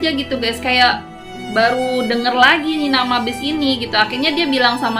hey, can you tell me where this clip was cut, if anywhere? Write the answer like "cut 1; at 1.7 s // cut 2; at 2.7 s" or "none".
none